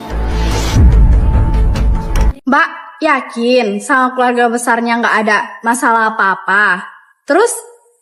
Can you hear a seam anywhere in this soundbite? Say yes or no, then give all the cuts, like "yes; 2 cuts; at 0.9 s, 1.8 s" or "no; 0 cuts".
no; 0 cuts